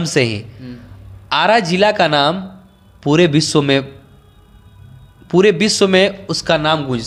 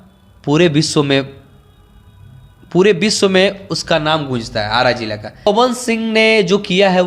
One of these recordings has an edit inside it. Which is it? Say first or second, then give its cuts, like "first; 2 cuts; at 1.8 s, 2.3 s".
second; 1 cut; at 5.5 s